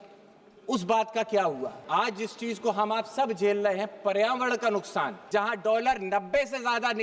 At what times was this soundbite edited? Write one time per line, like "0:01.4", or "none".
0:01.7
0:05.2